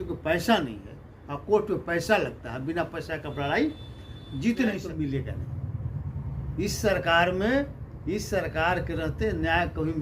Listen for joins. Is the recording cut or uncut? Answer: cut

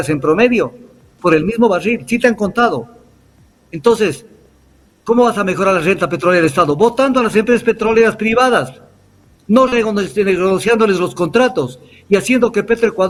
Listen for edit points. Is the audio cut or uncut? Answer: uncut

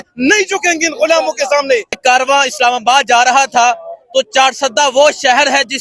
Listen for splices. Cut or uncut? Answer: cut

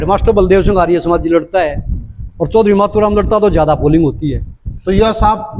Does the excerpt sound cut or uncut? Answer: uncut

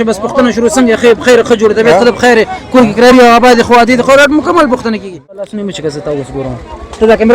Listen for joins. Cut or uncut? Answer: cut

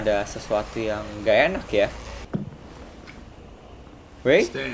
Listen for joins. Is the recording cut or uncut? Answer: cut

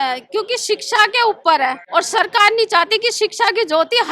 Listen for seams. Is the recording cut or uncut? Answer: cut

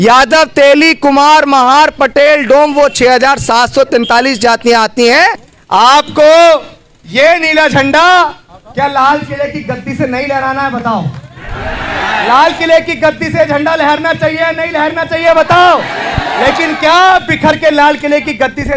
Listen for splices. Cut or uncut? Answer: cut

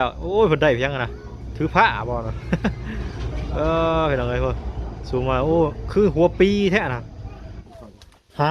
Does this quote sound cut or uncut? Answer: cut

